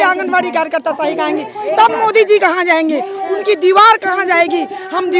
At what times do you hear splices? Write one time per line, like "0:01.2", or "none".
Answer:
none